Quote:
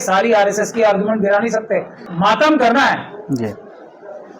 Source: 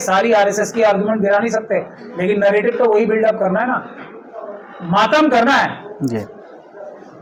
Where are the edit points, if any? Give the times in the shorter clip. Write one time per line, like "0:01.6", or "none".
0:02.0